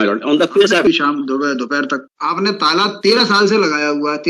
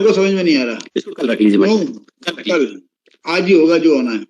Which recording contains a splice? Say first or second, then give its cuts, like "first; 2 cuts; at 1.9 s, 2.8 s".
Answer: first; 2 cuts; at 0.9 s, 2.0 s